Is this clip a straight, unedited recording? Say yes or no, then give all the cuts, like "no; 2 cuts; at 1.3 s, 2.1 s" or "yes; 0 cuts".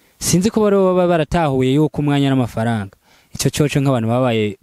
yes; 0 cuts